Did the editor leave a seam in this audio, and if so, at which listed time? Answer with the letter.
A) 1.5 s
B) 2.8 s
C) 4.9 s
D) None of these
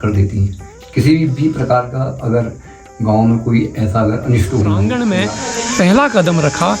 C